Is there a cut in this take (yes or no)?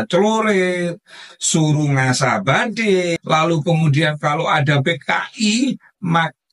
yes